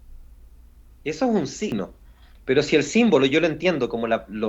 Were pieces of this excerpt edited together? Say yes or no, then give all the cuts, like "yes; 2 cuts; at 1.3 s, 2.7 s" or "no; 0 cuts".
yes; 1 cut; at 1.7 s